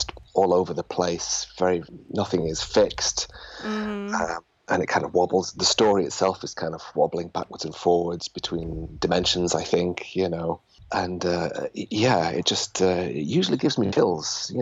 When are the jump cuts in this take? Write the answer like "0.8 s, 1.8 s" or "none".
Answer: none